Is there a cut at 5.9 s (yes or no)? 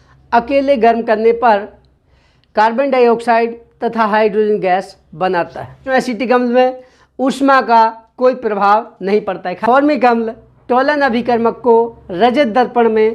yes